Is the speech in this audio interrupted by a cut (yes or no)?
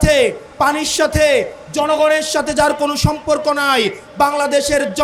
no